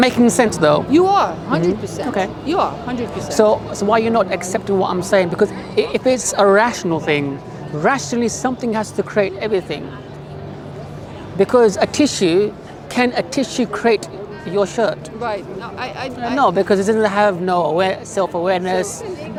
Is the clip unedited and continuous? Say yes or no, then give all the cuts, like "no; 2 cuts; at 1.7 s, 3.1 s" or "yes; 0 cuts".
yes; 0 cuts